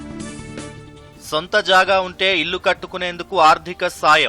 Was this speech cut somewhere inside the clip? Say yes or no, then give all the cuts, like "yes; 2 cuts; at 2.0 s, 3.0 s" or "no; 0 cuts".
yes; 1 cut; at 1.1 s